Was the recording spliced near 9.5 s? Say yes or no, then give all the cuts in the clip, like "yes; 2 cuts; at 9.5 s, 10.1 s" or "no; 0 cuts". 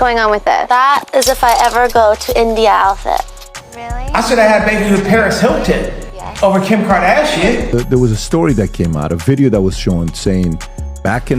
no; 1 cut; at 7.7 s